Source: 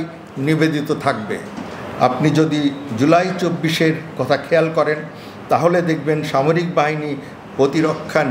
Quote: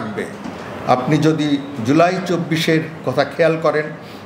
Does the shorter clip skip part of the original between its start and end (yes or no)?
no